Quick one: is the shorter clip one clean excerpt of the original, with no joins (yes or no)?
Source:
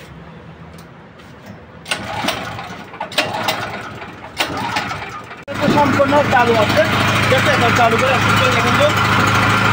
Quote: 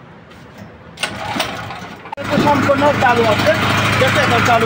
no